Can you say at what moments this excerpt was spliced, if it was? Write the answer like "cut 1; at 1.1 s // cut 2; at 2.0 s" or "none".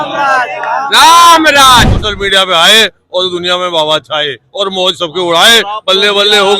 cut 1; at 2.0 s